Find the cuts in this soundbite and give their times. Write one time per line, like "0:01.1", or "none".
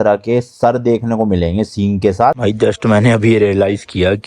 0:02.3